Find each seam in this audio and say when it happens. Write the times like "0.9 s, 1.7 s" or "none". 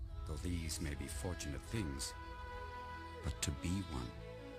1.0 s